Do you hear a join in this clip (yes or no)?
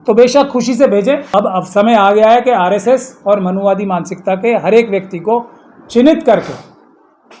yes